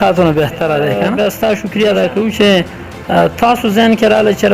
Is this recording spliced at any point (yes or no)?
yes